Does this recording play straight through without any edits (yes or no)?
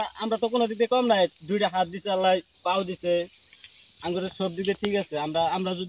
yes